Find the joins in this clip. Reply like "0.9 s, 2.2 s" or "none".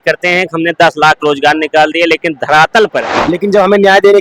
3.1 s